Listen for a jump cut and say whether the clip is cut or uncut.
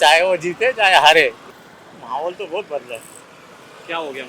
cut